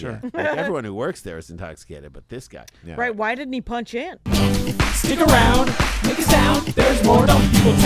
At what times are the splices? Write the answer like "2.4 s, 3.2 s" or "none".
4.2 s